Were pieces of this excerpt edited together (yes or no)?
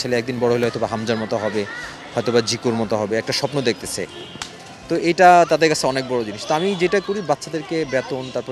no